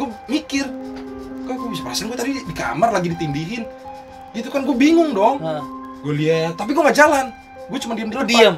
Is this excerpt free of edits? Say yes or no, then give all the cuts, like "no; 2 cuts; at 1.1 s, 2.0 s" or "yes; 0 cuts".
yes; 0 cuts